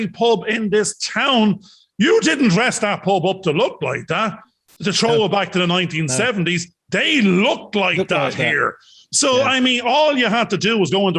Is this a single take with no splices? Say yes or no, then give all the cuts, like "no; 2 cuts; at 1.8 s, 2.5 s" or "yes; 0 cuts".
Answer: yes; 0 cuts